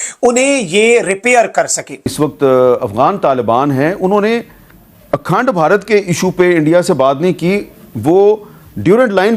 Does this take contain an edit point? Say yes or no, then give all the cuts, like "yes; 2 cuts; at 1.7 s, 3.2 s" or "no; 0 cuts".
yes; 1 cut; at 2.1 s